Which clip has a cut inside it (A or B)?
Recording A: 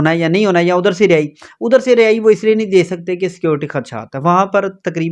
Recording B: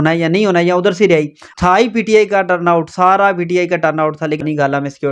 B